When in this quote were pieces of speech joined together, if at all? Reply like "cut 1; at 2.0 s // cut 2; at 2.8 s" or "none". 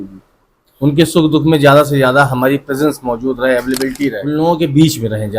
cut 1; at 4.2 s